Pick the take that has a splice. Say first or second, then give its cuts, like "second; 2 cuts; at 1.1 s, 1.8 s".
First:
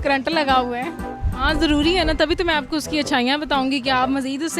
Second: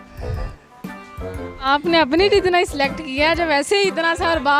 first; 1 cut; at 1.0 s